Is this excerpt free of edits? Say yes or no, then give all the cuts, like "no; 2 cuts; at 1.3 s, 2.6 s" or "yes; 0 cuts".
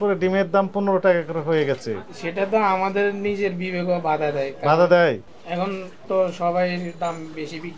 no; 1 cut; at 5.2 s